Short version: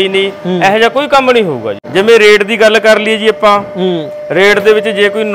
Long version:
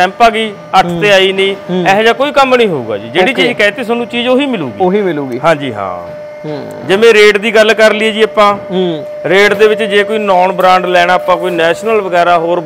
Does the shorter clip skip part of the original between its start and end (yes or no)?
yes